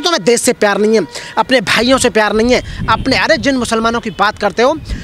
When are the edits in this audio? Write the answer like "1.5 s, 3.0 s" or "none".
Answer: none